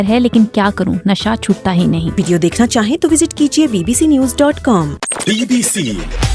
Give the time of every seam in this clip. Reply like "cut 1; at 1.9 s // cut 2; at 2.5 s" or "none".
cut 1; at 2.2 s // cut 2; at 5.0 s